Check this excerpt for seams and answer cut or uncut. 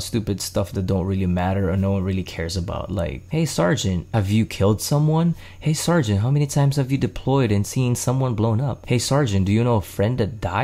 cut